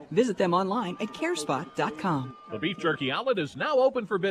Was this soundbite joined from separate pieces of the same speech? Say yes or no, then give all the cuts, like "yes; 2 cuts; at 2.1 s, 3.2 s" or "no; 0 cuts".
yes; 1 cut; at 2.4 s